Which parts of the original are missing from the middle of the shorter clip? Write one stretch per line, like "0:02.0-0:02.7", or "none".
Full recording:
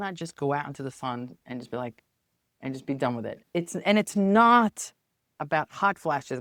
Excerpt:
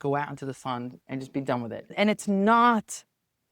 0:01.4-0:02.5
0:03.4-0:03.8